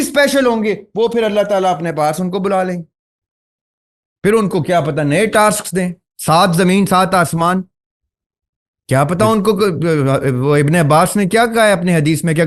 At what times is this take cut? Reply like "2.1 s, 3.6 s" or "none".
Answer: none